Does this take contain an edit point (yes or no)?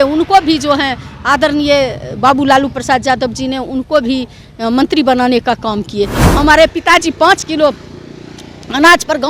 yes